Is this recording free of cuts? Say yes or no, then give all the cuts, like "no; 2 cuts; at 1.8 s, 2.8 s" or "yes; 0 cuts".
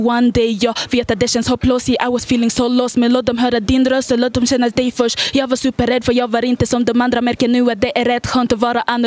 yes; 0 cuts